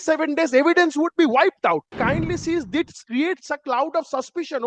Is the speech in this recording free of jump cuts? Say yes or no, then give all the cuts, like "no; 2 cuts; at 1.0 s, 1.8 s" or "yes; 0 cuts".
no; 1 cut; at 1.9 s